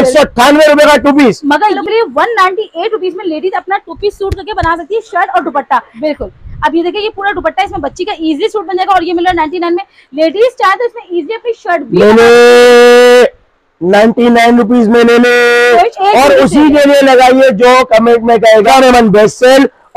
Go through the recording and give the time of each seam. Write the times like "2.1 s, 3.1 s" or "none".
1.8 s, 5.9 s, 15.9 s, 18.7 s